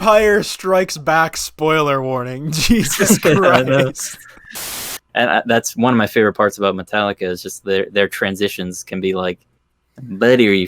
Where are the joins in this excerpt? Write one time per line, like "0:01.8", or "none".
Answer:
0:04.8